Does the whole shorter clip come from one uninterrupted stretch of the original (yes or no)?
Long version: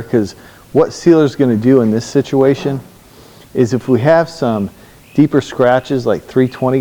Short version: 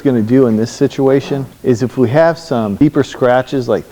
no